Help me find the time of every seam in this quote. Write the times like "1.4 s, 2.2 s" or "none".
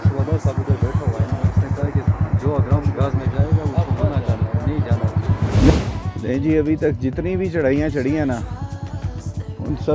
5.7 s